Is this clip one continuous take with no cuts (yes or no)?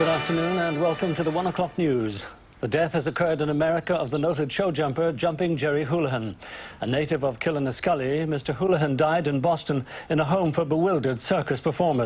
no